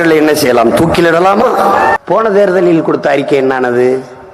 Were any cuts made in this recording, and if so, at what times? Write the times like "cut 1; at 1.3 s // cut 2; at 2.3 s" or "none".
cut 1; at 2.0 s